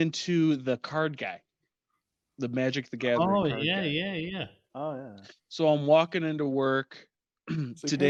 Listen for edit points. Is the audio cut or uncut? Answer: uncut